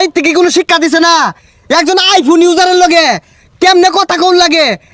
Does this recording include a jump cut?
no; 0 cuts

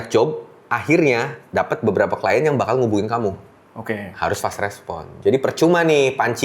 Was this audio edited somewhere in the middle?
yes; 2 cuts; at 1.4 s, 4.1 s

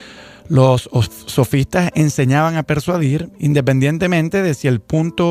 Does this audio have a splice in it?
yes; 1 cut; at 3.1 s

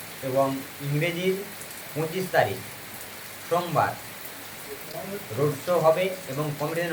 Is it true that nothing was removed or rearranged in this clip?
yes; 0 cuts

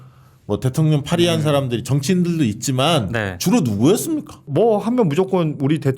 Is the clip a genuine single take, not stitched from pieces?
no; 1 cut; at 4.4 s

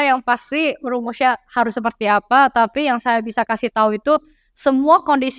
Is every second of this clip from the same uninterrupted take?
yes; 0 cuts

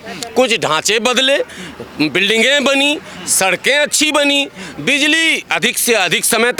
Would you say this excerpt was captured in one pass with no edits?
yes; 0 cuts

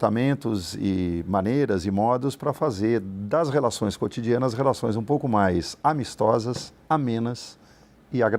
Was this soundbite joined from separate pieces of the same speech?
no; 0 cuts

